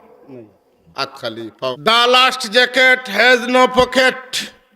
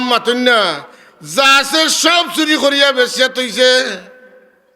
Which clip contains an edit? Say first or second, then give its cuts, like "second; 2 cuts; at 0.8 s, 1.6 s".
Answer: first; 1 cut; at 1.8 s